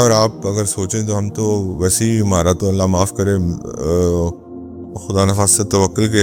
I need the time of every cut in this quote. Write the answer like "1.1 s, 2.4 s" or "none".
none

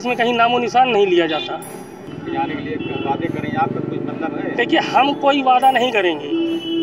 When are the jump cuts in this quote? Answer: none

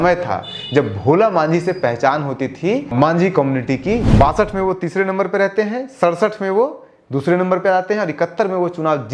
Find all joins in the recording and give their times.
2.9 s, 4.0 s

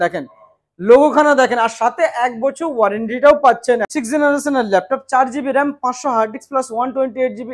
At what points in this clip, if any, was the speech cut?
3.9 s

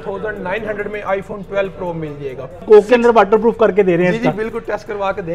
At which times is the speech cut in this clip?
2.6 s

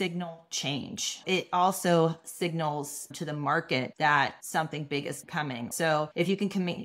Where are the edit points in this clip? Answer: 1.2 s, 5.7 s

